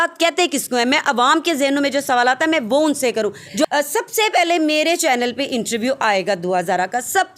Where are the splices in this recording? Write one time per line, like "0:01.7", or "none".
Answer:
0:03.7